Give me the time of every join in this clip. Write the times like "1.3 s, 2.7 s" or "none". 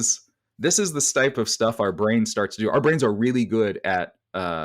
1.3 s

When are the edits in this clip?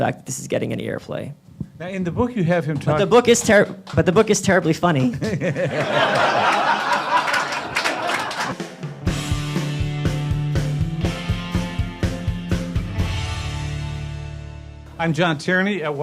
1.4 s, 8.2 s

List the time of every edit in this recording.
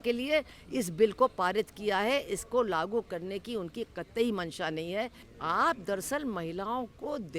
5.2 s

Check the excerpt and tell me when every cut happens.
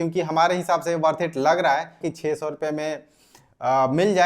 2.0 s

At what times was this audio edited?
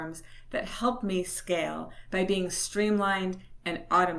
none

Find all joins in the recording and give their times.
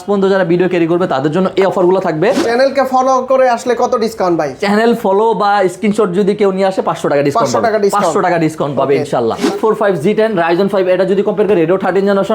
2.4 s, 9.5 s

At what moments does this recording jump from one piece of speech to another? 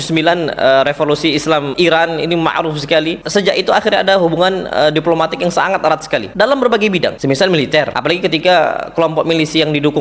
1.7 s, 3.2 s, 6.3 s, 7.2 s, 7.9 s

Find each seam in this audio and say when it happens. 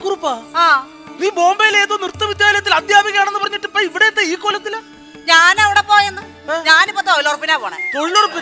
1.0 s

